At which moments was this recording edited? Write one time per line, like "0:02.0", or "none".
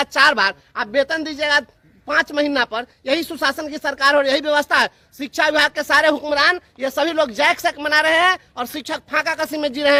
none